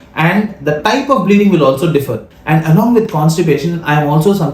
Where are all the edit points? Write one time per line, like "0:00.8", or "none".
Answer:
0:02.3